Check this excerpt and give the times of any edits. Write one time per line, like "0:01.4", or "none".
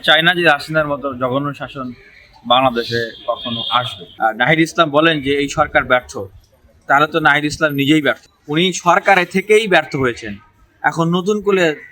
0:04.0
0:08.3